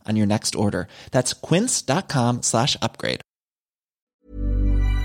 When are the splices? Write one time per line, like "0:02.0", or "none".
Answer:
0:04.1